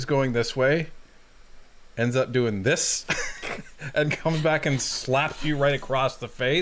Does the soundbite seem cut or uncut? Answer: uncut